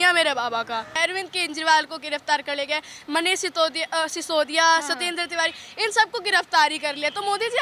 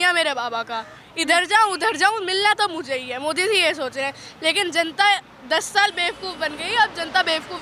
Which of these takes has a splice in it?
first; 1 cut; at 1.0 s

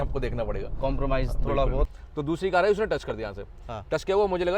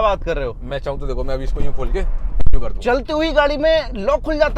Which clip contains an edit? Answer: first; 1 cut; at 1.9 s

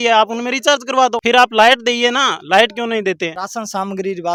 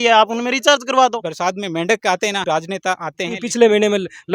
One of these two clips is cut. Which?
second; 2 cuts; at 1.2 s, 3.4 s

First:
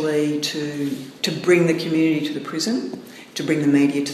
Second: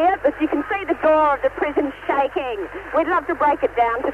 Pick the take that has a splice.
first; 1 cut; at 1.1 s

